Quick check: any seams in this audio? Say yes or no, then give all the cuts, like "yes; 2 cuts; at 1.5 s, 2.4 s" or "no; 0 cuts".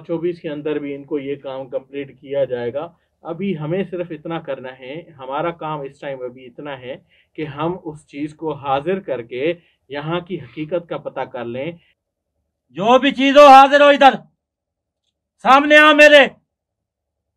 yes; 1 cut; at 11.9 s